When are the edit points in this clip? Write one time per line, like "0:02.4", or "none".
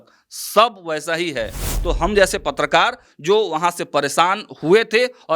0:01.7